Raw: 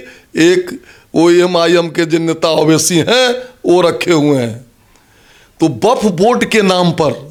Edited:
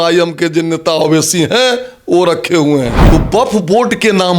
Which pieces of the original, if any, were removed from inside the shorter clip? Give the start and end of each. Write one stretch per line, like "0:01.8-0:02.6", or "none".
0:04.5-0:05.5